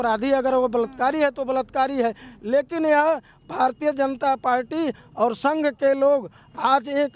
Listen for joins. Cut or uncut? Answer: uncut